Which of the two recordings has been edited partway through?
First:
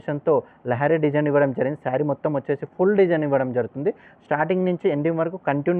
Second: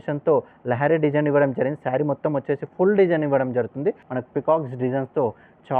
second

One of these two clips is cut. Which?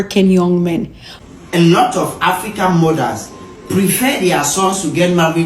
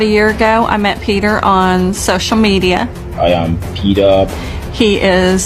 first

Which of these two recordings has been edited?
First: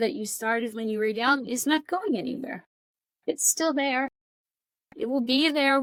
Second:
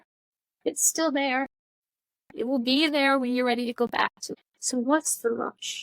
second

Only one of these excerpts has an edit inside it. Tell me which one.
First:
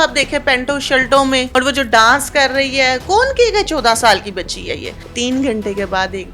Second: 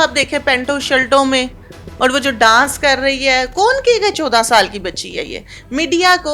first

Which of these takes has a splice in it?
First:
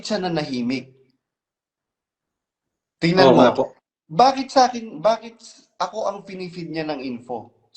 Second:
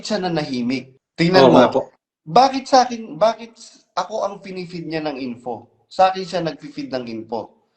second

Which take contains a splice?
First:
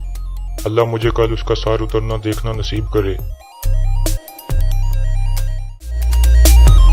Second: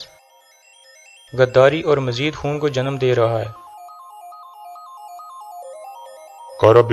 first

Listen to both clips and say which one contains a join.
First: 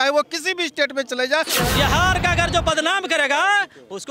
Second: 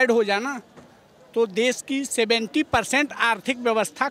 first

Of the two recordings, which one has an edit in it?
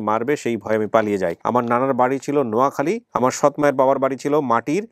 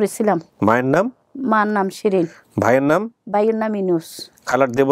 first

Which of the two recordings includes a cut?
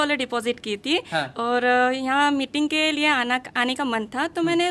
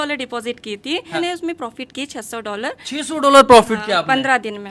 second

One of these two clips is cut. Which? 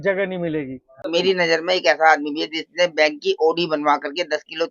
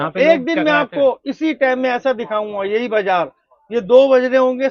first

